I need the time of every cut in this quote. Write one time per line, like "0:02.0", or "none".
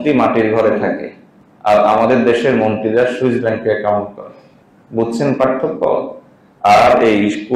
none